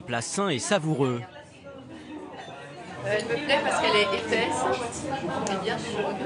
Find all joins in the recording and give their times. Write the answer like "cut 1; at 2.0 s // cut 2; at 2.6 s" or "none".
cut 1; at 1.5 s